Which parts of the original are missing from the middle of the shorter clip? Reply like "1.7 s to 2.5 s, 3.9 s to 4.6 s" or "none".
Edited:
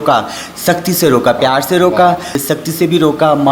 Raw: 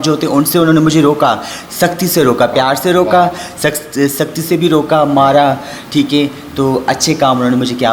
3.6 s to 4.1 s